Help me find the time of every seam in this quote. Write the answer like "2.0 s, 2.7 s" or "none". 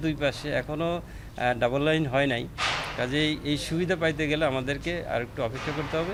none